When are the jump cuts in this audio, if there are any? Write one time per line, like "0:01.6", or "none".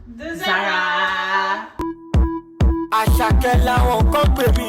0:01.7